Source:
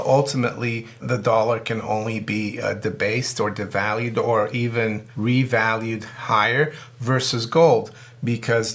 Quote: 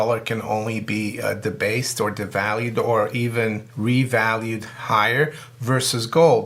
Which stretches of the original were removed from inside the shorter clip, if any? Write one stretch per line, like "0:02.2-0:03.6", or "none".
none

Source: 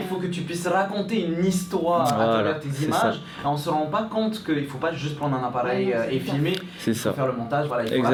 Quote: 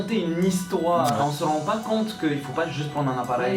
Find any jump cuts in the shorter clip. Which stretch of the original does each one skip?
0:02.2-0:03.4

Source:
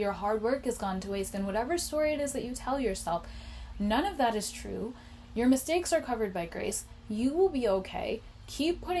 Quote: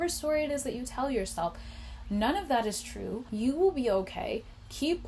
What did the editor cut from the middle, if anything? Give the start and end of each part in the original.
0:04.9-0:07.0

